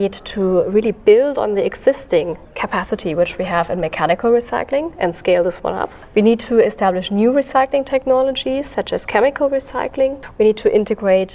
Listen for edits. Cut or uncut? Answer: cut